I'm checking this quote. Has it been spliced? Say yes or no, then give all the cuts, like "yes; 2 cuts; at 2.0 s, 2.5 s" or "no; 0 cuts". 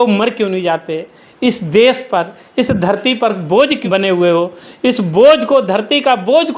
yes; 1 cut; at 3.8 s